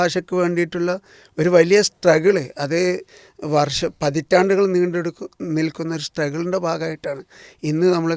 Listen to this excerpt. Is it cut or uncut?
uncut